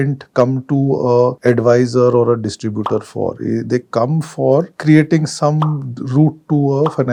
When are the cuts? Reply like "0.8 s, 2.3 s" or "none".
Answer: none